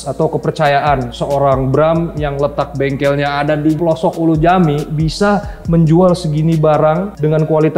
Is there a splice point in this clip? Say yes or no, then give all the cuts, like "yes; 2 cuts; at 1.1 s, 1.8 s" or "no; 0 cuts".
yes; 1 cut; at 3.8 s